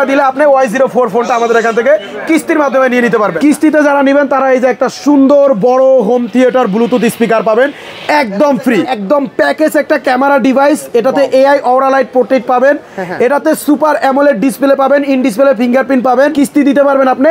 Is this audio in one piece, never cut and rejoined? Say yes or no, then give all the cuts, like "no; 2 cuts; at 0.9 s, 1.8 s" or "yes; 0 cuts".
no; 3 cuts; at 3.3 s, 8.9 s, 16.3 s